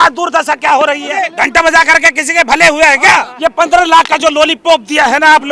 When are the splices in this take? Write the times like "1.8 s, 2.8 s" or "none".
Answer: 1.4 s, 3.3 s